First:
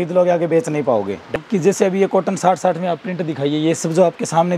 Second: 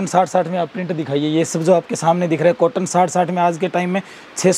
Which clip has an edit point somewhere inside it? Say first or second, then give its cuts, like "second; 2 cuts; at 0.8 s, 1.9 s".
first; 1 cut; at 1.3 s